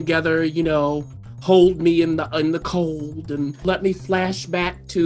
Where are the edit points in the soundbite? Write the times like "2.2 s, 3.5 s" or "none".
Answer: 3.7 s